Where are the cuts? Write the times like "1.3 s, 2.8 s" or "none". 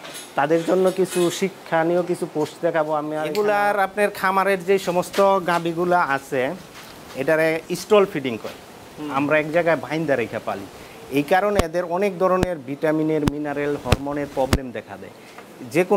3.2 s